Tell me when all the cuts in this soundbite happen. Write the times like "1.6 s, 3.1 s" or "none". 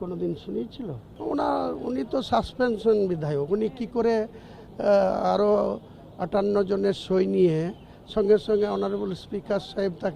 1.0 s